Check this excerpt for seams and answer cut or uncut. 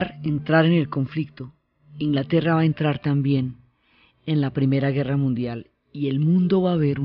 cut